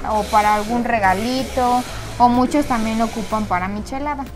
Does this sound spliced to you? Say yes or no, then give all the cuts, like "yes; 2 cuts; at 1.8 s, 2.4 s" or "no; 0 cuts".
no; 0 cuts